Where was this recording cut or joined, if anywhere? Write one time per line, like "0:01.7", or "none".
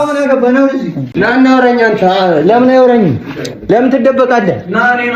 0:01.0